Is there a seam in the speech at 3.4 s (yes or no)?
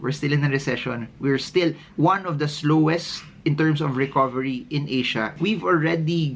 no